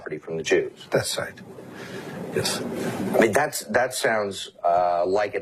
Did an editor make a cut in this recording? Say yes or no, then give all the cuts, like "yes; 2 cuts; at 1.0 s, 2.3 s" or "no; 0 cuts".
no; 0 cuts